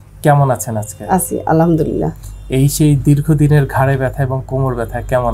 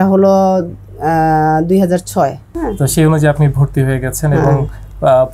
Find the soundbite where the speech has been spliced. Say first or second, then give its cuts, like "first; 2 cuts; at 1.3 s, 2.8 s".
second; 1 cut; at 2.5 s